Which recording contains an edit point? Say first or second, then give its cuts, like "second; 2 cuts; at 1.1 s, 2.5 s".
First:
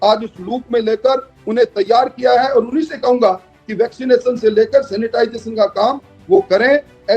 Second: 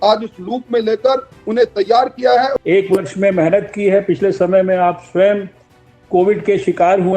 second; 1 cut; at 2.5 s